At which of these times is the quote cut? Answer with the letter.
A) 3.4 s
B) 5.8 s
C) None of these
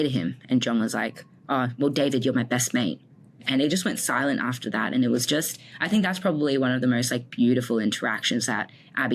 A